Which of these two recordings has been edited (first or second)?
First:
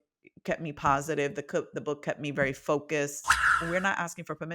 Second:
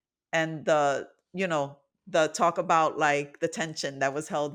first